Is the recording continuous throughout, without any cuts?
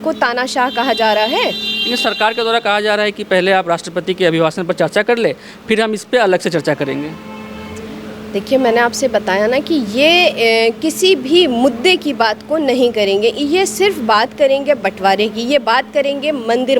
yes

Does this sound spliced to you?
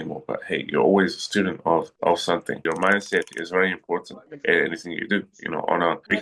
yes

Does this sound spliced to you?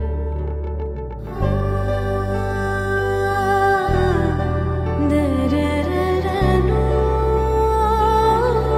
no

